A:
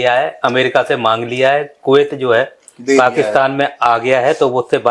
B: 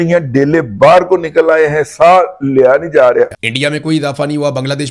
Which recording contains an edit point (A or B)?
B